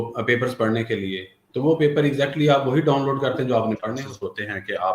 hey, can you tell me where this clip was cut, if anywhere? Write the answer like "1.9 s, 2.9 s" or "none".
4.0 s